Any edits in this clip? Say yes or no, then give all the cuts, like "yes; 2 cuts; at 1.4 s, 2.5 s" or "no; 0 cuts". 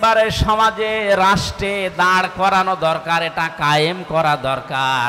no; 0 cuts